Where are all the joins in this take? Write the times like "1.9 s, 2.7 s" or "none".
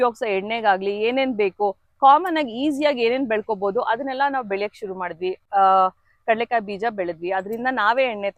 none